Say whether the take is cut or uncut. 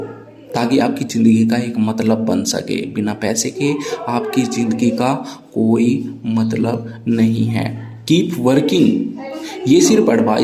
uncut